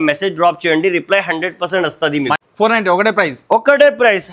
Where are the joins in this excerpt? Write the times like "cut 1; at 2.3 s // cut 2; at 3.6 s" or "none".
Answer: cut 1; at 2.4 s